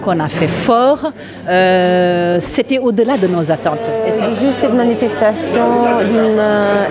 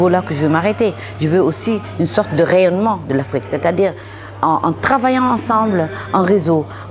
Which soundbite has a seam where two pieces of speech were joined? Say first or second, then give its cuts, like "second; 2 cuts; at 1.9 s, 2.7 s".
first; 1 cut; at 4.0 s